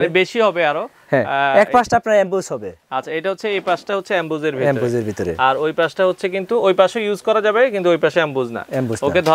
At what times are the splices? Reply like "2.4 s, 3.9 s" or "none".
none